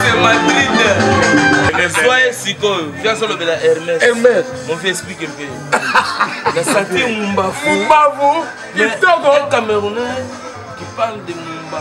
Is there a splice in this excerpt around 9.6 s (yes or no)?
no